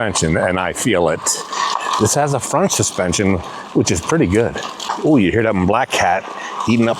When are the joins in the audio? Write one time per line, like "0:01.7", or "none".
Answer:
0:04.8